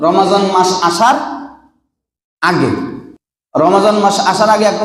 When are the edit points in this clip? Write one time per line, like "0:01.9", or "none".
0:03.1